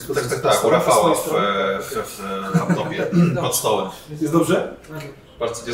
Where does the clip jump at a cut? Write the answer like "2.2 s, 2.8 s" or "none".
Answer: none